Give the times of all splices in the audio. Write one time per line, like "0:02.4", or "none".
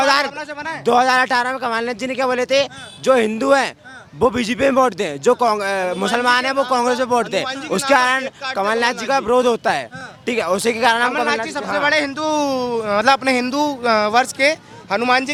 none